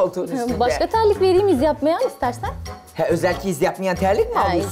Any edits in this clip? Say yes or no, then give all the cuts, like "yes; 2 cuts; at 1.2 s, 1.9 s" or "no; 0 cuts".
no; 0 cuts